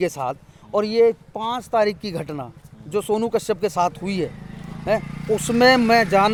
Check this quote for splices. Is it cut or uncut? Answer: uncut